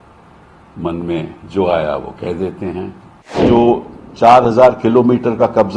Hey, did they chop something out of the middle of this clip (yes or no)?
yes